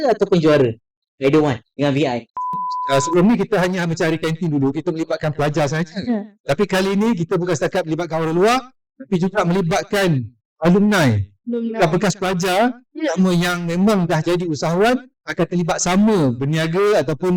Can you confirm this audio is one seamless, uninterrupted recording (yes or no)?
no